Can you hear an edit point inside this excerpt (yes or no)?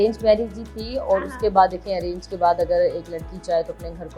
no